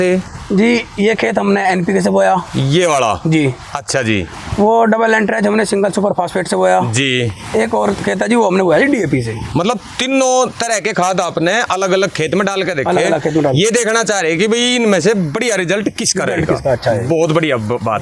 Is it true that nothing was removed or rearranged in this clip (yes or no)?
yes